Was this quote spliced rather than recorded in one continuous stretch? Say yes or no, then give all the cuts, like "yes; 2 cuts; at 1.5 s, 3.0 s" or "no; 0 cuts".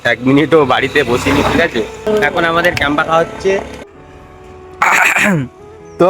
yes; 2 cuts; at 2.1 s, 3.8 s